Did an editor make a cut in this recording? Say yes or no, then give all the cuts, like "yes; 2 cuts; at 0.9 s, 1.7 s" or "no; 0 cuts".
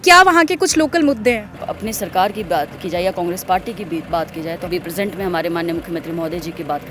yes; 2 cuts; at 1.7 s, 4.7 s